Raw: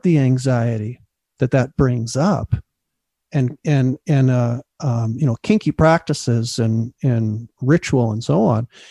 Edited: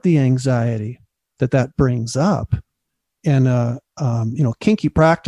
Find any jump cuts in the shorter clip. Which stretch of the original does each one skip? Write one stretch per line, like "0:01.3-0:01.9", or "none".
0:03.2-0:04.0